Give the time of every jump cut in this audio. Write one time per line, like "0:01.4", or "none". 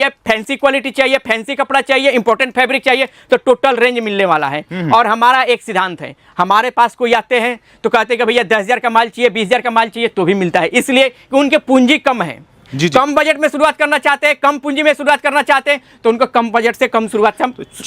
none